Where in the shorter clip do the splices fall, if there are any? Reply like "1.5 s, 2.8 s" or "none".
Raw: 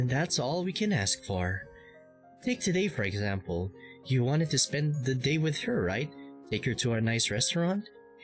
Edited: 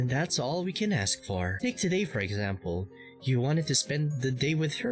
1.5 s